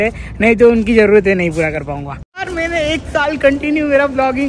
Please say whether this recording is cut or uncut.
cut